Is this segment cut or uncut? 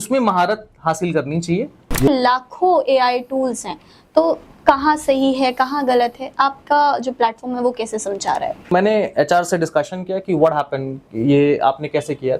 cut